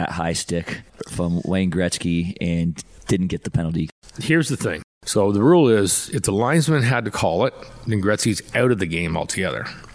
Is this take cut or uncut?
cut